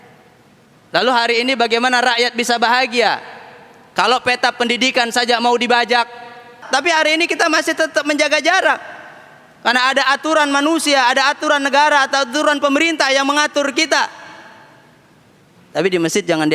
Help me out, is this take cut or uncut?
cut